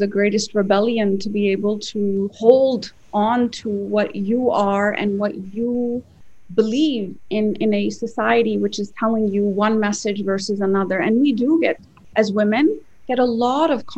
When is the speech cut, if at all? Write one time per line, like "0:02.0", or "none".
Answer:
0:02.3